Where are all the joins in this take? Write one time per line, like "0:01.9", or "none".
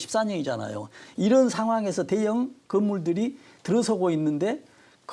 none